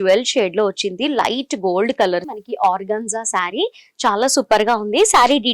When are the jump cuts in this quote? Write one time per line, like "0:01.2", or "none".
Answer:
0:02.3